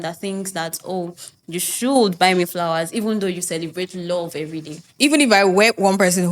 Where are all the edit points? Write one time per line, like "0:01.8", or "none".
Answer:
0:04.9